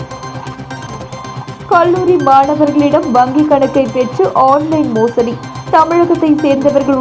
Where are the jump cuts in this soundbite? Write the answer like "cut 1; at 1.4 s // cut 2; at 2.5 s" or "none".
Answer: none